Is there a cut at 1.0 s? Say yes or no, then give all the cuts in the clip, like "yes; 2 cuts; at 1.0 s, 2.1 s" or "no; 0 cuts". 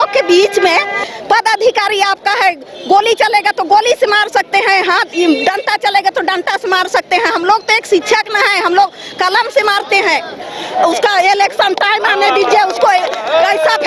yes; 2 cuts; at 1.0 s, 10.6 s